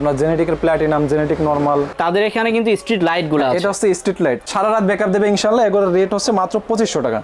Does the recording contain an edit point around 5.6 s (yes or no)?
no